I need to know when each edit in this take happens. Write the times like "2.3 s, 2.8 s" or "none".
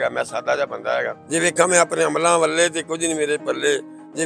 1.2 s